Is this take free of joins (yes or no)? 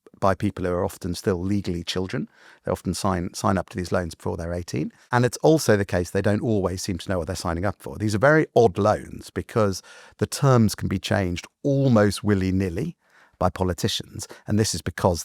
no